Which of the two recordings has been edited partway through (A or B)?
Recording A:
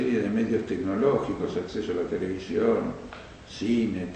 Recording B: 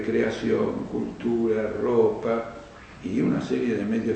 A